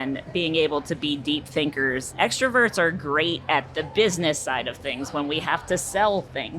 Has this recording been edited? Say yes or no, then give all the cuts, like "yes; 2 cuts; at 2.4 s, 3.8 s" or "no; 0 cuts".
yes; 1 cut; at 2.0 s